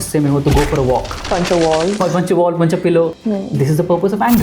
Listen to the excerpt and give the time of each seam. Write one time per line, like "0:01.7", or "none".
0:02.0
0:03.1